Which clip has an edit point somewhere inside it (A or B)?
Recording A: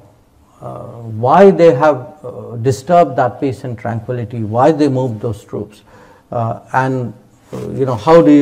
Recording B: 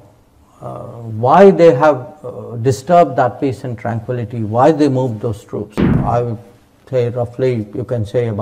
B